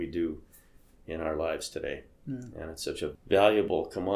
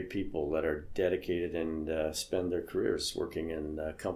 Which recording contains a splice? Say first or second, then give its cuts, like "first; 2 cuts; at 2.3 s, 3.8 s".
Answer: first; 1 cut; at 3.2 s